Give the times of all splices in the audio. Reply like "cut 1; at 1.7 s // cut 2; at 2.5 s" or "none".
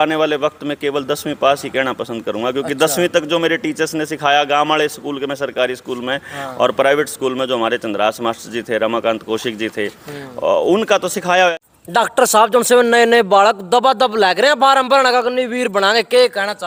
none